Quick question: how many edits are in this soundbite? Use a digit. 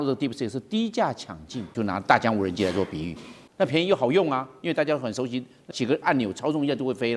3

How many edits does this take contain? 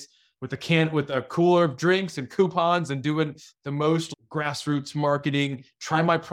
1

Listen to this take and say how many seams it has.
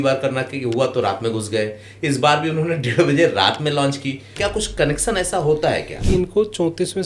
2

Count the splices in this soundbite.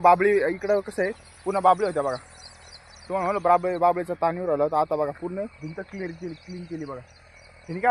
0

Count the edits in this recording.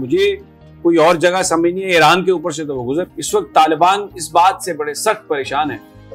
1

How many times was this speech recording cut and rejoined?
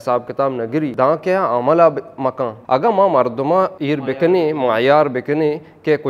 3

